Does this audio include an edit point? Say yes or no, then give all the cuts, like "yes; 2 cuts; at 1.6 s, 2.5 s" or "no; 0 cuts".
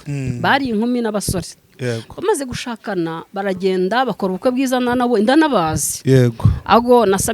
no; 0 cuts